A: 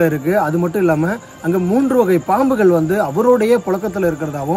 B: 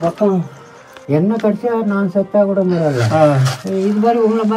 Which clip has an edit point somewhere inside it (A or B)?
B